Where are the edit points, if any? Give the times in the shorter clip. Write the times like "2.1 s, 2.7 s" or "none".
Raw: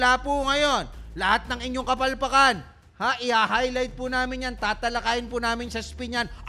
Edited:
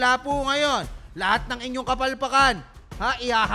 none